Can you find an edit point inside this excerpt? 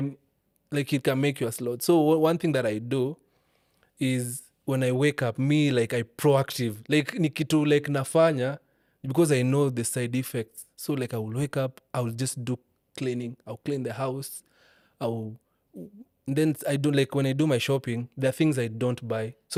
no; 0 cuts

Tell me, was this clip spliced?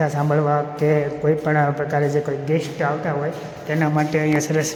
no; 0 cuts

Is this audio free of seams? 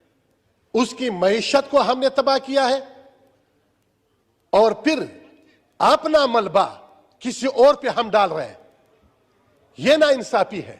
yes; 0 cuts

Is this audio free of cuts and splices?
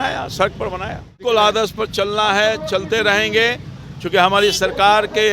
no; 1 cut; at 1.2 s

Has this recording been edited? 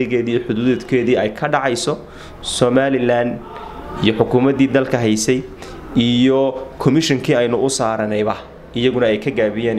no; 0 cuts

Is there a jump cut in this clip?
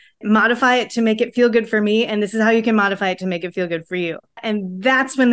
yes; 1 cut; at 4.4 s

